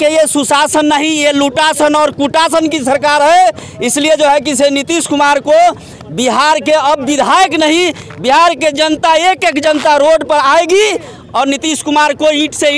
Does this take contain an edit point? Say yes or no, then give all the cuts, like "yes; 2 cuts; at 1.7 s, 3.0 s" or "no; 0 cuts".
no; 0 cuts